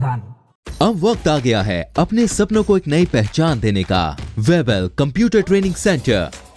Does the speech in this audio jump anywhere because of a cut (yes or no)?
yes